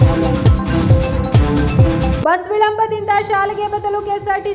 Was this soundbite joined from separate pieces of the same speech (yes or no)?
yes